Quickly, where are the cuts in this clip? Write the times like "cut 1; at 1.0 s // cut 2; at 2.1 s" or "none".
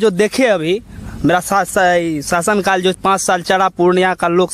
none